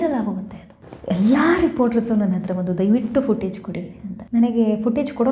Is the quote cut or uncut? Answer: uncut